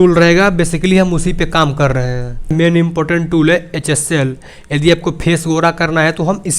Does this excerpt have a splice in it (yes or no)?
yes